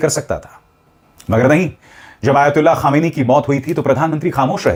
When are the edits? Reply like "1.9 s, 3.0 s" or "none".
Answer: none